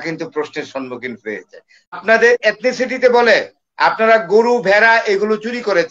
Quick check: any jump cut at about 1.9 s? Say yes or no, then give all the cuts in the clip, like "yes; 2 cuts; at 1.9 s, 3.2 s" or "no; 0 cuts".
yes; 1 cut; at 1.9 s